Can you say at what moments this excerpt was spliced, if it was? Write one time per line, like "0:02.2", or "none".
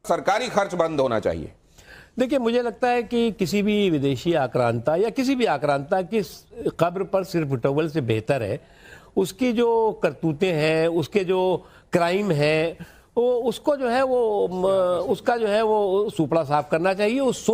none